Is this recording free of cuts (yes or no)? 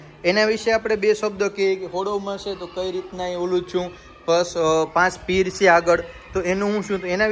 yes